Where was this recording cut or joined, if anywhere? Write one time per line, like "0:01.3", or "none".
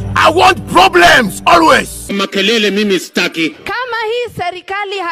0:03.6